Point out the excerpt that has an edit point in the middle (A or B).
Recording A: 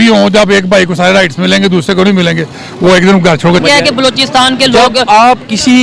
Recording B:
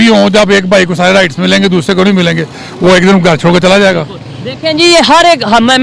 A